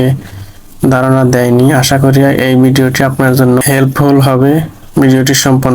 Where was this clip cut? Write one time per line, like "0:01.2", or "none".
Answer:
0:03.6